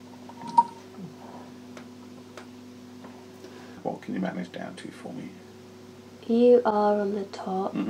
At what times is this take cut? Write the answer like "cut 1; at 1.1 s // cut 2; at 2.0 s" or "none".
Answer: cut 1; at 3.8 s